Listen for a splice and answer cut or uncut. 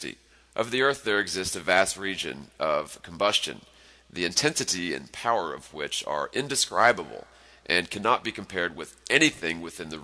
uncut